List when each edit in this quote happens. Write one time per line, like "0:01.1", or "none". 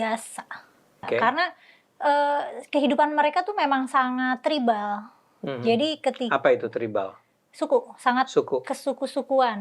0:00.9